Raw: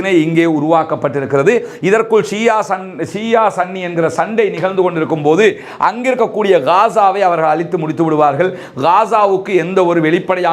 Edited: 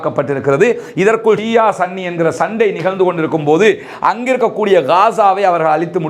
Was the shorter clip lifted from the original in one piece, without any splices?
no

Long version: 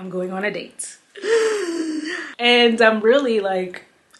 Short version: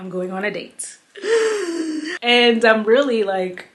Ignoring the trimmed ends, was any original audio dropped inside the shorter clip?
yes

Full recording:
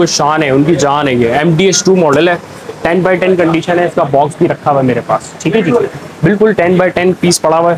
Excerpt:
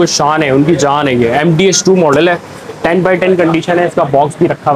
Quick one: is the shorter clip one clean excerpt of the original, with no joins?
yes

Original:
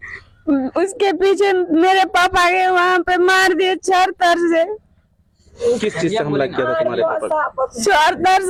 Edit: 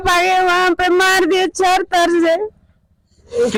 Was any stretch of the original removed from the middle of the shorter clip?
no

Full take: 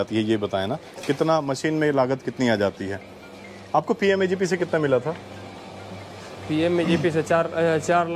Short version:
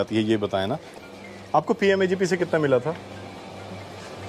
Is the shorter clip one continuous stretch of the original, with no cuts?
no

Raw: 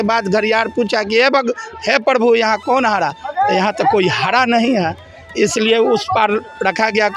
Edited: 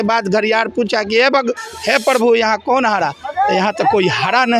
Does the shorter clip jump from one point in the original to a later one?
no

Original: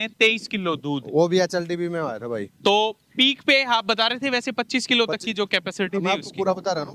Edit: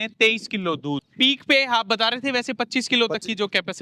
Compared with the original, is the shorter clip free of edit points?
no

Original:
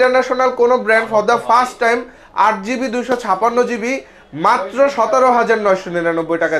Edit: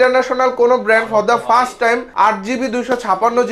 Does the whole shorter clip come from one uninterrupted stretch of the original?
no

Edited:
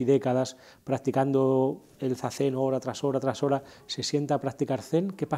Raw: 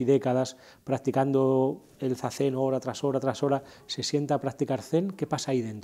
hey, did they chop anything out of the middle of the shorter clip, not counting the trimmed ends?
no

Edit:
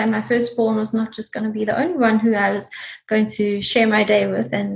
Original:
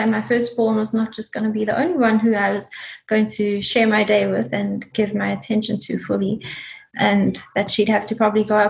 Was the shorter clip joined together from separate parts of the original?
no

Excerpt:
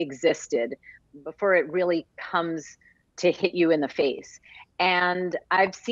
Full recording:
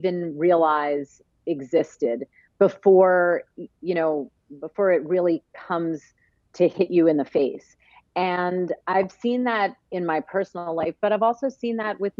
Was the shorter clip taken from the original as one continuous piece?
no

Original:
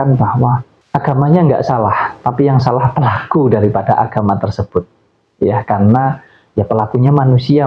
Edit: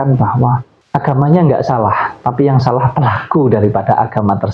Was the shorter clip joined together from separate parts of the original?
no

